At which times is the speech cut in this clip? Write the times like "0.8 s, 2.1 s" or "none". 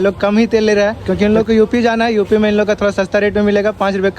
1.0 s